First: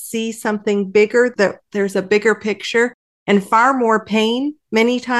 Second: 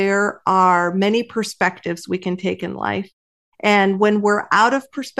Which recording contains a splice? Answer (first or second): first